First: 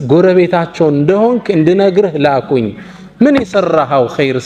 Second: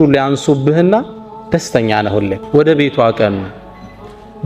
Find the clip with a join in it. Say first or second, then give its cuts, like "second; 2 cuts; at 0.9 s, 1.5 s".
second; 1 cut; at 2.4 s